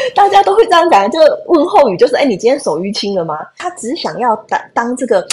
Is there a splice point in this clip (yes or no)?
yes